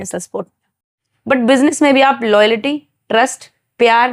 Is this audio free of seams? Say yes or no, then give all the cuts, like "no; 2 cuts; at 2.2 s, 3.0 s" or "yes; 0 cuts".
no; 1 cut; at 1.0 s